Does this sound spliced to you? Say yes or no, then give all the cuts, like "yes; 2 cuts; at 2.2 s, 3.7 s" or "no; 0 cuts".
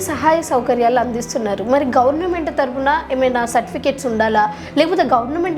no; 0 cuts